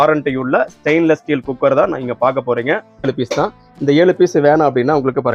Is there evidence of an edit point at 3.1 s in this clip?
yes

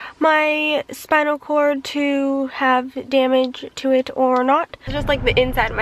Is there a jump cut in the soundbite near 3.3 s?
no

